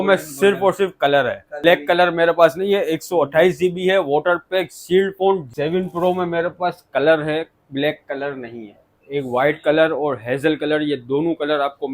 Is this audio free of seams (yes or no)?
no